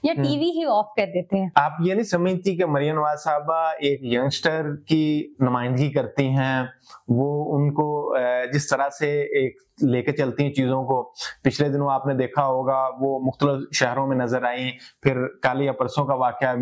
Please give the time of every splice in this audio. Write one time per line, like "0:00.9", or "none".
none